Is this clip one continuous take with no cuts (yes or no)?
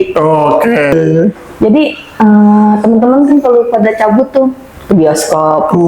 no